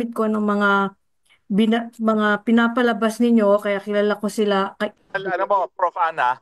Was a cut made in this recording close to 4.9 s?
yes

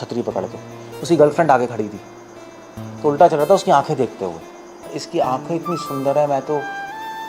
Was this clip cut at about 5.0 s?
yes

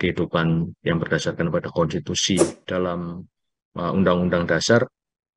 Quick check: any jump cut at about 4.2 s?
no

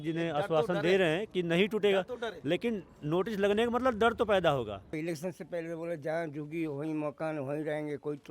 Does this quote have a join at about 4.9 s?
yes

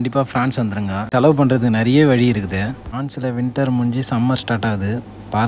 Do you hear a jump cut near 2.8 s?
yes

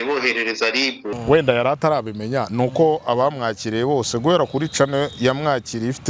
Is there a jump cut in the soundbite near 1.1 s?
yes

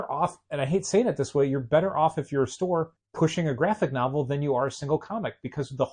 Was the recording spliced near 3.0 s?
yes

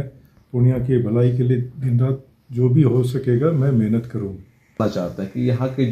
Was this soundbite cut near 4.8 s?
yes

